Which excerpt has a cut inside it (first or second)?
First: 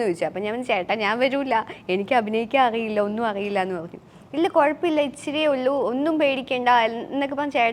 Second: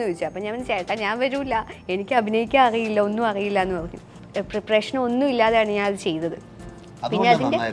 second